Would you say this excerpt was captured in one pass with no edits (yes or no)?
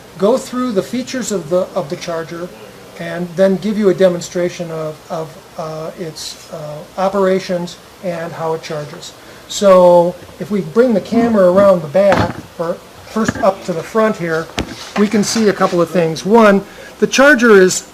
no